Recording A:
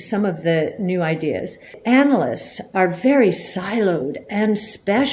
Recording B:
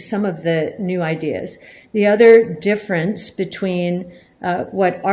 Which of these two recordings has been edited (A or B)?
A